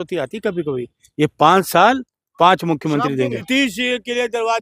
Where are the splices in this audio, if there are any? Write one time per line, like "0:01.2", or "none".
0:03.4